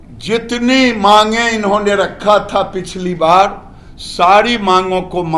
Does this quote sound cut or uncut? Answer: uncut